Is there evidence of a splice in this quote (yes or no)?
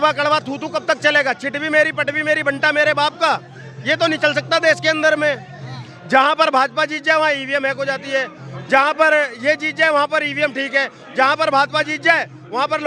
no